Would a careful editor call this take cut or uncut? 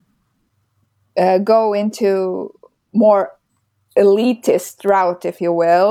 uncut